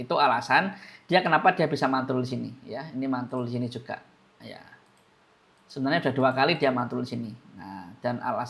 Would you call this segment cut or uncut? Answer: uncut